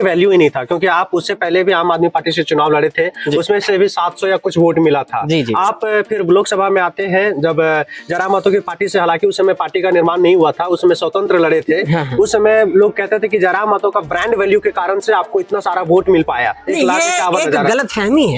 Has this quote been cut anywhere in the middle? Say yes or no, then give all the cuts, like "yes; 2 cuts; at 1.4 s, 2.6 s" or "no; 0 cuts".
no; 0 cuts